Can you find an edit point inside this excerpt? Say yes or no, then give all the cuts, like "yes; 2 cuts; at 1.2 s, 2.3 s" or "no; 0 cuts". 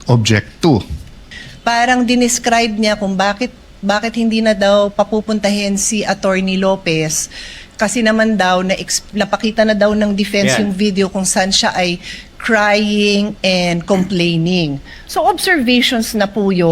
yes; 1 cut; at 1.4 s